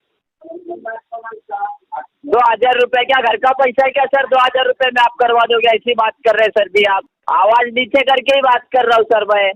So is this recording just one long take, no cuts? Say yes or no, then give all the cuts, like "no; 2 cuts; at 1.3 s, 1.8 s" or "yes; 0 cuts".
no; 1 cut; at 7.1 s